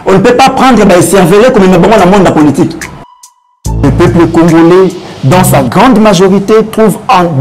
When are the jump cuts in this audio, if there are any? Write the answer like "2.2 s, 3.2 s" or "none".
3.5 s